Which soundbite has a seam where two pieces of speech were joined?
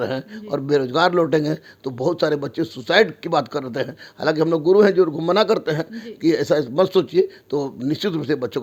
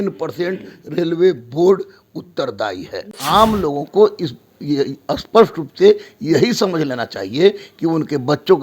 second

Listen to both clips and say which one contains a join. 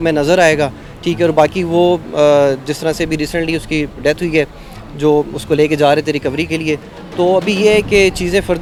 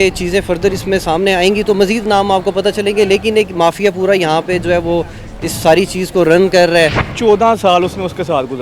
second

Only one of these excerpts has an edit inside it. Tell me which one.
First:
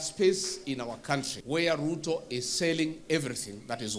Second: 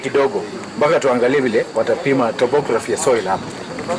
first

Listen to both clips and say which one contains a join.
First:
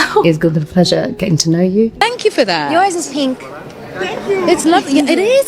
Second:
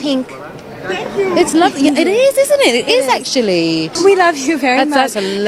first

